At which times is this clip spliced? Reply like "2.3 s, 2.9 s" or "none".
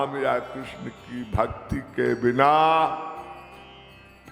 none